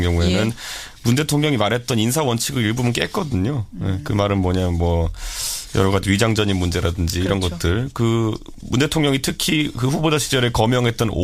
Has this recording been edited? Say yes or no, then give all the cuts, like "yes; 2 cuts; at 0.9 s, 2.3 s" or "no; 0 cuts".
yes; 1 cut; at 2.1 s